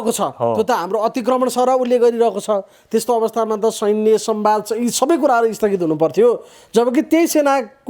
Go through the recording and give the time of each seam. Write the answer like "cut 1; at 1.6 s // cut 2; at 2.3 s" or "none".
none

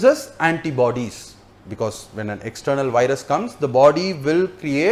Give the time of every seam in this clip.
none

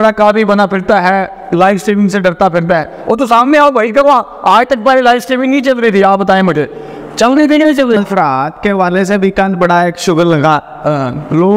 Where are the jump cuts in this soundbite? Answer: cut 1; at 8.0 s

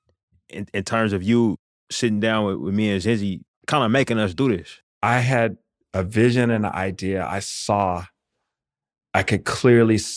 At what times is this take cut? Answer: cut 1; at 3.6 s // cut 2; at 4.8 s

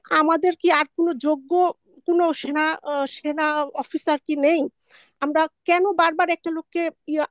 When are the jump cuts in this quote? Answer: none

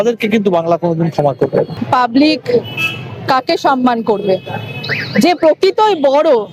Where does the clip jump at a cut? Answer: cut 1; at 1.8 s

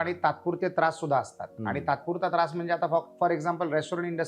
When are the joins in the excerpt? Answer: none

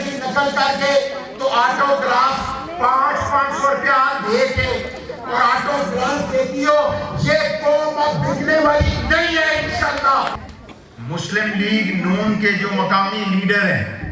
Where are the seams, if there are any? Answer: cut 1; at 10.4 s

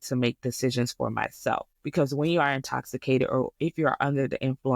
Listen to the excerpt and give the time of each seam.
cut 1; at 1.8 s

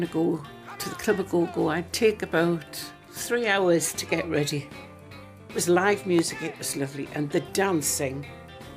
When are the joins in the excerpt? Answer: none

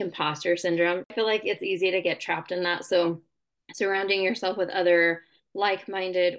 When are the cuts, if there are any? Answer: cut 1; at 1.1 s

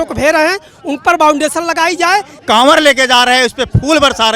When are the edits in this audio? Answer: cut 1; at 2.4 s

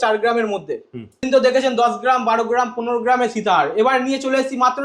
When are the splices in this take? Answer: cut 1; at 1.2 s

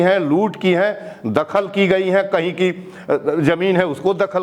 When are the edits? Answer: none

